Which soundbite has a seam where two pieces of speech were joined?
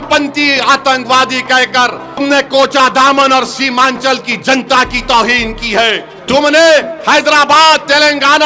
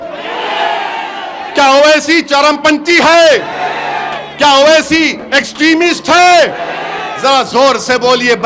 first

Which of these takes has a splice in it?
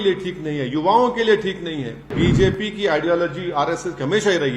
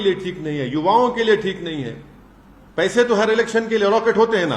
first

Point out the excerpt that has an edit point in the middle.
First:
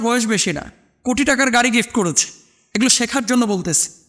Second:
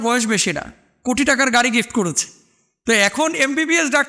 first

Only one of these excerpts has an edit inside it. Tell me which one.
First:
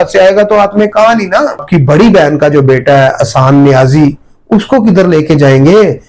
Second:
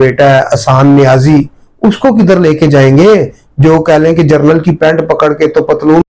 first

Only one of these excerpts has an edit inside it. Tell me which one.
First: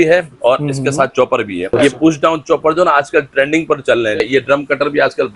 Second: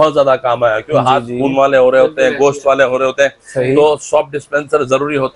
first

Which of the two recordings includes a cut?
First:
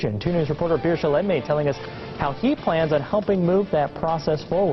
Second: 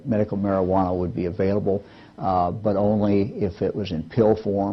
first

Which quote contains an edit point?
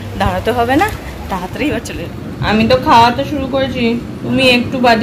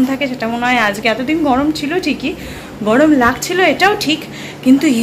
first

